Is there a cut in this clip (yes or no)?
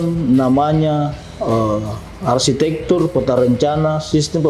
no